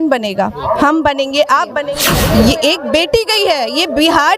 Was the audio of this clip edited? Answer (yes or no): yes